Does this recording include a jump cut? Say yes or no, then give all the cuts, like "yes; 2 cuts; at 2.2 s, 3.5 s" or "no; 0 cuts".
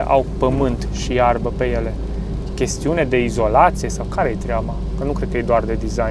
no; 0 cuts